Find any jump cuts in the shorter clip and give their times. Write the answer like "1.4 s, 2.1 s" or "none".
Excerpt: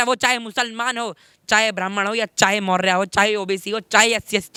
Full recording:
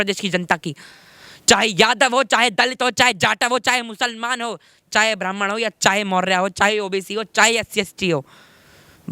none